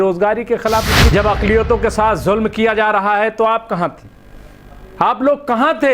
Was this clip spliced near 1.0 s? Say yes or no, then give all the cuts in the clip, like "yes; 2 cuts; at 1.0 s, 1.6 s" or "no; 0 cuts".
yes; 1 cut; at 1.0 s